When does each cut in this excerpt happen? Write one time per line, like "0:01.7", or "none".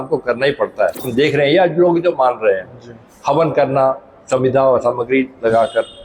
0:01.0